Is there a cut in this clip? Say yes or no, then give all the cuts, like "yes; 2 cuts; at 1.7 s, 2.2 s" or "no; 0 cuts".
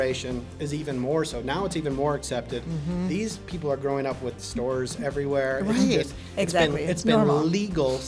no; 0 cuts